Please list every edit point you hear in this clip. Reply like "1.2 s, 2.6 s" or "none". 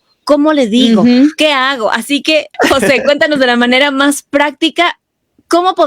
2.5 s